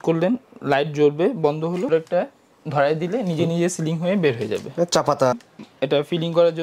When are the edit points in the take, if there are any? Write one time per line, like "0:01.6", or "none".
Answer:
0:01.9
0:05.3